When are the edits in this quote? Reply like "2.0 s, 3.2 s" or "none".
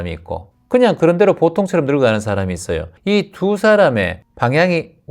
2.9 s, 4.2 s